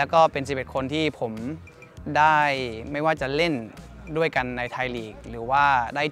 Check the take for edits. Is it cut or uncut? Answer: uncut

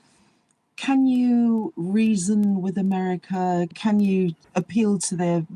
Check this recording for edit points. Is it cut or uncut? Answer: cut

